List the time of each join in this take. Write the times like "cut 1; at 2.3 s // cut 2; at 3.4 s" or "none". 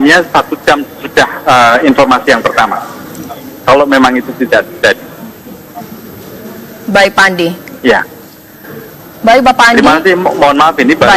cut 1; at 7.1 s